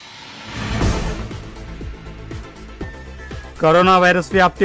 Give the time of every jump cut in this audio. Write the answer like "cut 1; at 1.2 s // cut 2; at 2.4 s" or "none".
none